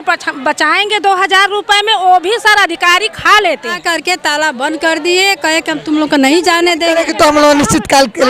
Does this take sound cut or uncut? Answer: cut